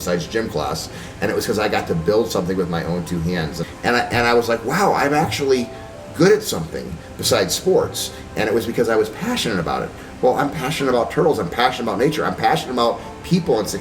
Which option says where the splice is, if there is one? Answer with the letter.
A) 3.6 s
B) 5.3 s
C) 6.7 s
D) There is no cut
A